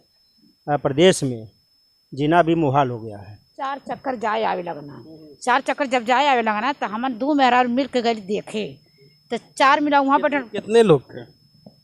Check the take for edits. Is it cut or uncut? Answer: cut